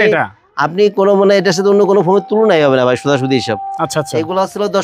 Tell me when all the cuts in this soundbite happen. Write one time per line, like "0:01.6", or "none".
none